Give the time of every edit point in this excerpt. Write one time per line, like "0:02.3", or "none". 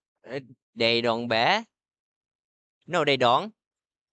none